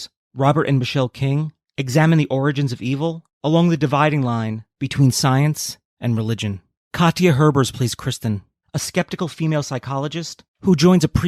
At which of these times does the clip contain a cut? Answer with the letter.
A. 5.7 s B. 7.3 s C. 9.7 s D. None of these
D